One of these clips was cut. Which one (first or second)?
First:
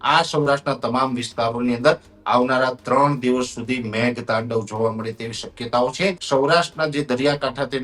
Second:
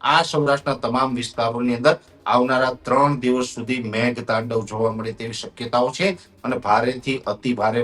first